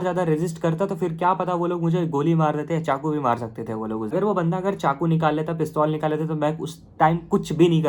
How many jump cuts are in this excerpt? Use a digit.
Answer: 1